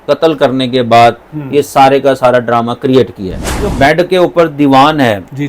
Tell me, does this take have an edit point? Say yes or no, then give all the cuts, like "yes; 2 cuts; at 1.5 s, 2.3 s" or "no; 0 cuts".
yes; 1 cut; at 3.7 s